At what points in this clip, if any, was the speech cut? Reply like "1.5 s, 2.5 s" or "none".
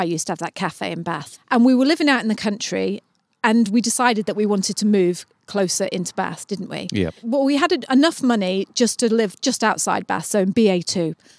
1.3 s, 7.3 s